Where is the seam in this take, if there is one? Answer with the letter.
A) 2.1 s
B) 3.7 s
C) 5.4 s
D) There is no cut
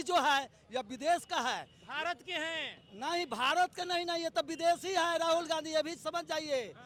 D